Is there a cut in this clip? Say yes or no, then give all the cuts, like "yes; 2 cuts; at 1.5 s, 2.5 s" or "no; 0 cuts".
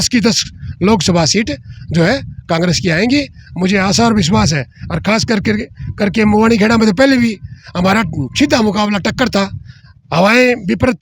no; 0 cuts